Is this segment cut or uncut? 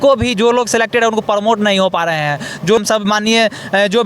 cut